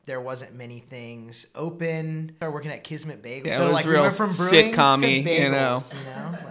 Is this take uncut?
no; 2 cuts; at 2.3 s, 3.4 s

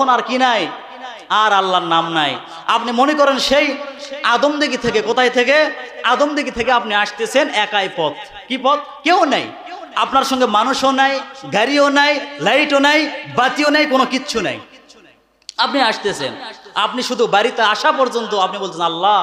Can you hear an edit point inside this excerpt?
no; 0 cuts

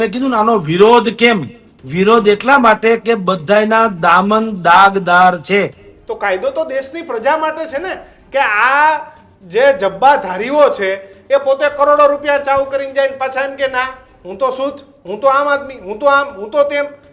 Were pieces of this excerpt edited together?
yes; 1 cut; at 5.9 s

